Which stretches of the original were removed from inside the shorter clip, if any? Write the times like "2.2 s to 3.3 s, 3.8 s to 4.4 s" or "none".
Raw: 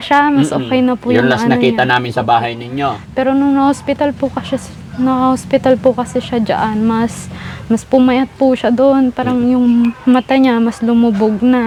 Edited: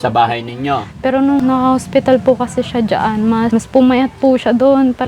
3.5 s to 5.0 s, 7.1 s to 7.7 s